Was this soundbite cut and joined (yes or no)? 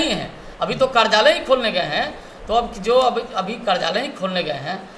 no